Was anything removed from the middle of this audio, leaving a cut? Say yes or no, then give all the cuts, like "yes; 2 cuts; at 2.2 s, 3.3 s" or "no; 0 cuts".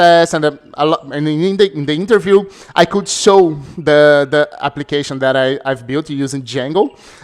no; 0 cuts